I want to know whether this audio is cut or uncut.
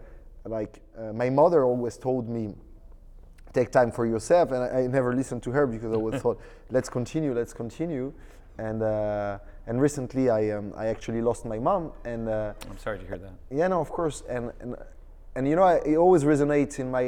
uncut